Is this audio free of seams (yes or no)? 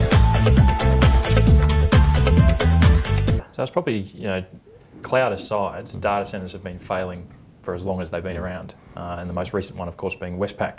yes